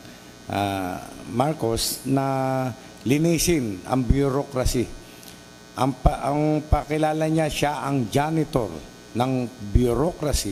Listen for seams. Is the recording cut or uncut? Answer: uncut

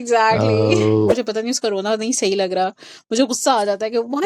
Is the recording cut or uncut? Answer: cut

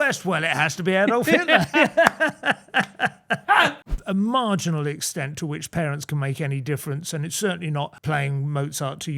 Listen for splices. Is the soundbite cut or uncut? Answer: cut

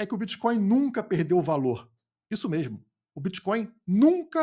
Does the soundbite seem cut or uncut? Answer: uncut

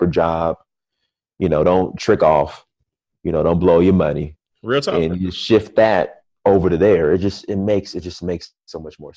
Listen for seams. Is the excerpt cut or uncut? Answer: uncut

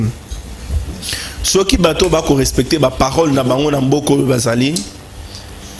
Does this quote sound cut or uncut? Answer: uncut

